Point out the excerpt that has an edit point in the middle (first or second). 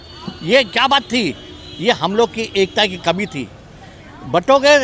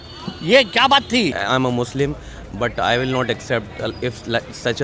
second